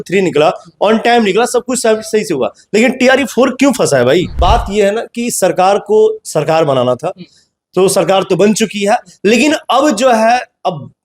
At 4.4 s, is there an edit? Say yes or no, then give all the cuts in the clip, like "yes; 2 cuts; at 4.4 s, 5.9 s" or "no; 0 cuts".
yes; 1 cut; at 4.4 s